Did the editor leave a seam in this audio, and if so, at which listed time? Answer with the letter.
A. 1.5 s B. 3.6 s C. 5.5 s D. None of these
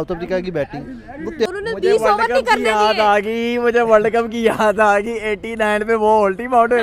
A